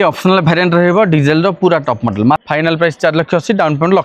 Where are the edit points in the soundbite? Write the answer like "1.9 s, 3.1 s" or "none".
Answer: 2.4 s